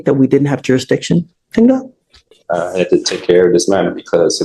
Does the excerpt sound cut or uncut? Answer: uncut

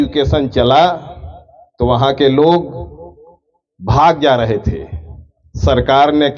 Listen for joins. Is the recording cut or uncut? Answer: uncut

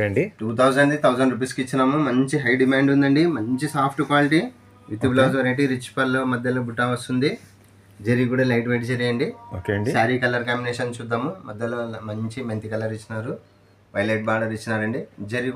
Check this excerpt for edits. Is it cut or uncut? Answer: uncut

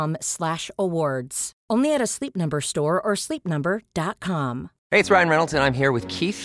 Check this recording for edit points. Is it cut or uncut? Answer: cut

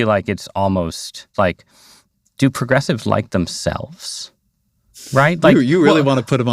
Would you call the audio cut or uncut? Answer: cut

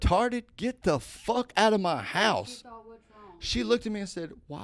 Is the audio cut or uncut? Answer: uncut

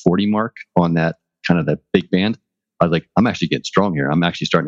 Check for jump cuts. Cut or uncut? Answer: cut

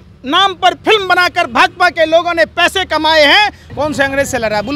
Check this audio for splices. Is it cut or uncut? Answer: cut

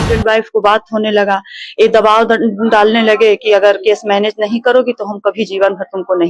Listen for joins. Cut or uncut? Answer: uncut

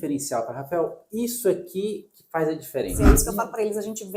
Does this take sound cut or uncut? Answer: cut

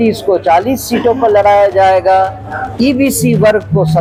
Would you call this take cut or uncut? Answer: uncut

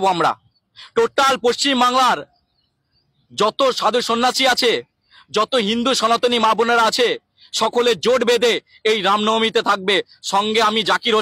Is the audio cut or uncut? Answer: uncut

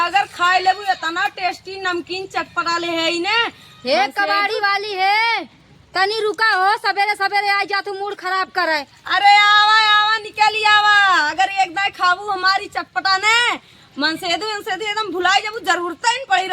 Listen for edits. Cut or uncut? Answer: cut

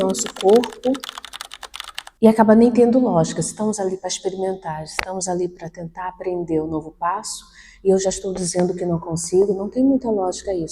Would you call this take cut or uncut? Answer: uncut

